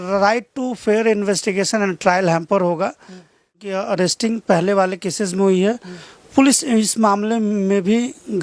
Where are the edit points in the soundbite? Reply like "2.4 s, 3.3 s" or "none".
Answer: 3.7 s